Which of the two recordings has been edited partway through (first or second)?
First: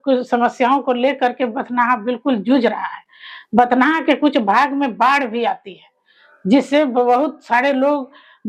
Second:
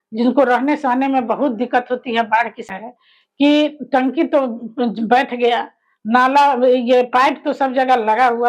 second